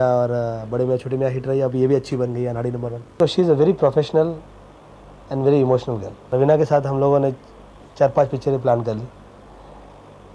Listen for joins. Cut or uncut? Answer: cut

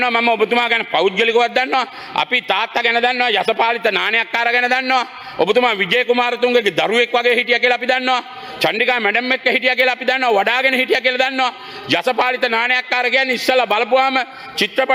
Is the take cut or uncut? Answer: uncut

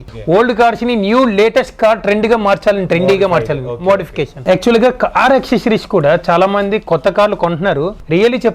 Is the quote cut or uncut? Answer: cut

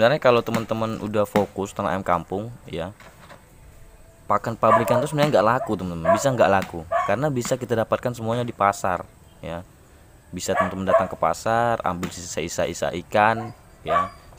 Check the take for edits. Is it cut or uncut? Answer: uncut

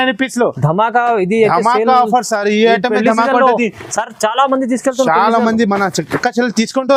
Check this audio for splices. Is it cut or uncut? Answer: uncut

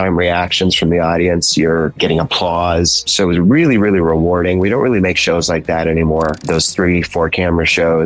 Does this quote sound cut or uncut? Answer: cut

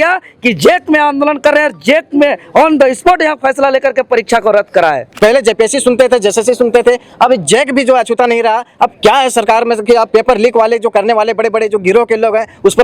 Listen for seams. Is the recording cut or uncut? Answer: cut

